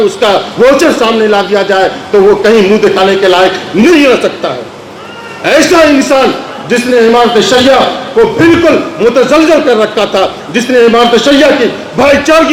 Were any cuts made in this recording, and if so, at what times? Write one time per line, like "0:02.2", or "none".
none